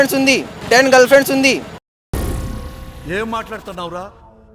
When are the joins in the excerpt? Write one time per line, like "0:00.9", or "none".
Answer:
none